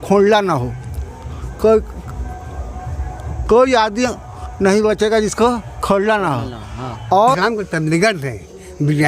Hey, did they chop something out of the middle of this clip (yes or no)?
yes